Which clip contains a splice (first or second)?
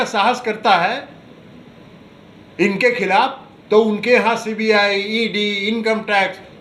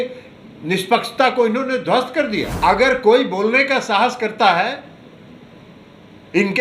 second